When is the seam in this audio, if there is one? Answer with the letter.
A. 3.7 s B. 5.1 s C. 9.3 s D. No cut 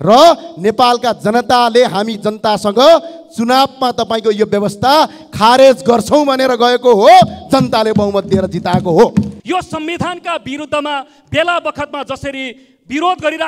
C